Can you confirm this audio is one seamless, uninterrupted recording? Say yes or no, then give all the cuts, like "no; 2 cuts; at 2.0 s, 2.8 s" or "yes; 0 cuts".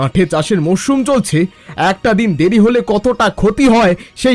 yes; 0 cuts